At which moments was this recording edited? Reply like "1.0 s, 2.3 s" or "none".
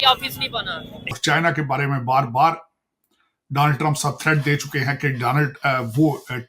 1.1 s